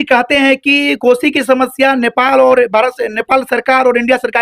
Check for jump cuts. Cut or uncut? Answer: uncut